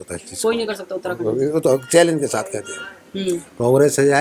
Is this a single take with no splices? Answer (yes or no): yes